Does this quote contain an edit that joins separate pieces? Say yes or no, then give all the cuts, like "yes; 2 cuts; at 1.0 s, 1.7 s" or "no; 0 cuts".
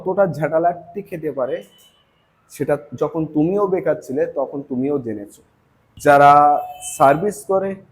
yes; 1 cut; at 5.8 s